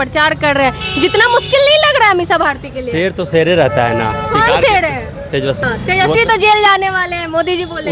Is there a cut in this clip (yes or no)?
yes